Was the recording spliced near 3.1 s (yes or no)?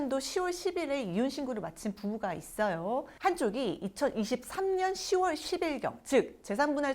yes